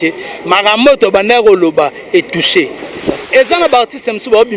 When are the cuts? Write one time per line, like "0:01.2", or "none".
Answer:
0:03.2

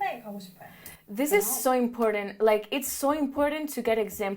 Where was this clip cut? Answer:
none

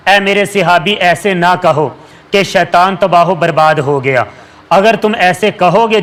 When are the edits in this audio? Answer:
none

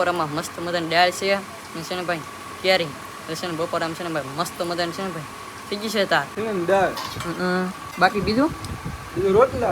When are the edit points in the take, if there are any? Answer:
0:06.3
0:07.8

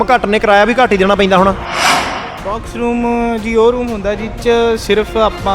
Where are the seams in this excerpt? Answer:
0:01.8

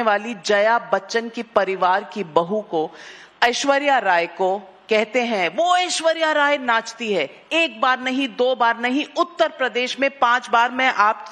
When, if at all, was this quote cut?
none

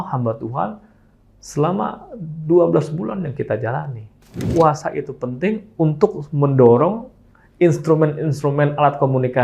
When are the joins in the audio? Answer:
0:04.4

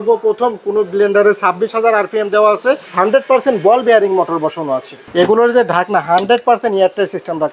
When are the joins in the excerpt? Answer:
0:02.9
0:04.9

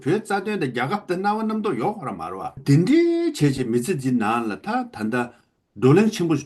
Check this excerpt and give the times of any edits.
0:02.6

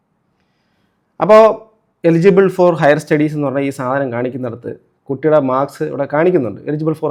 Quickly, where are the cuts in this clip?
none

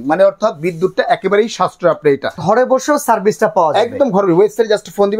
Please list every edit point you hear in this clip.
0:02.4

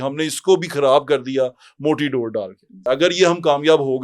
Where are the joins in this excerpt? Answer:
0:02.8

